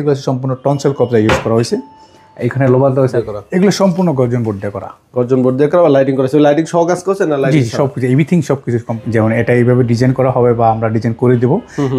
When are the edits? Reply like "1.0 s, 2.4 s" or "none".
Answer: 3.1 s, 8.9 s